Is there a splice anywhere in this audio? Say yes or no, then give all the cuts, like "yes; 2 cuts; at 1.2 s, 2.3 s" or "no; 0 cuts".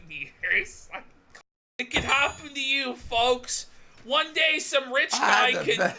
yes; 1 cut; at 1.2 s